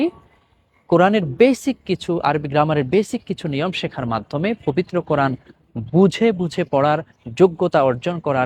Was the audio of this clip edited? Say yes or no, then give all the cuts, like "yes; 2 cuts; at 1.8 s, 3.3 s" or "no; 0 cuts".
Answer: no; 0 cuts